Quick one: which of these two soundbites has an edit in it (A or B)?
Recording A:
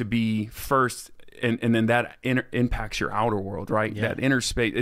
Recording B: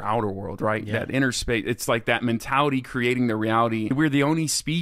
B